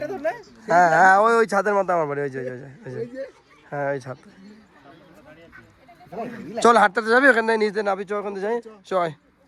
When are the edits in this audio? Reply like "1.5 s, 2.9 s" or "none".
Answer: none